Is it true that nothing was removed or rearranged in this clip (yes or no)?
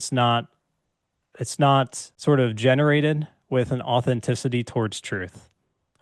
no